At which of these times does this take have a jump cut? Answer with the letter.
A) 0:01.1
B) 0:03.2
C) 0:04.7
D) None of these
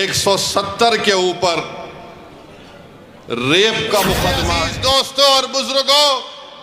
C